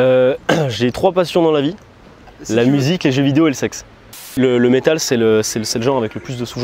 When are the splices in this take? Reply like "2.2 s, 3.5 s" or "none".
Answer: 4.3 s